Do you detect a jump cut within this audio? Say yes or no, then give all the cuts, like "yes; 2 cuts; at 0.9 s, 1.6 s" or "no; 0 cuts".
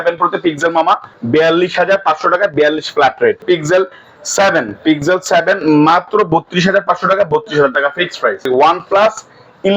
yes; 3 cuts; at 1.1 s, 3.4 s, 8.5 s